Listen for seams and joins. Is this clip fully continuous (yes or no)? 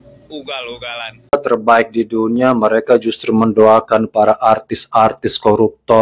no